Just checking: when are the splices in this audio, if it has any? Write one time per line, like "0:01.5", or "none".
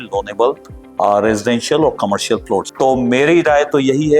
0:02.7